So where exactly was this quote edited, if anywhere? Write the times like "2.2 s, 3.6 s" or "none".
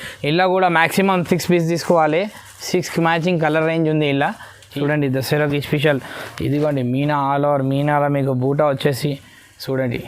4.7 s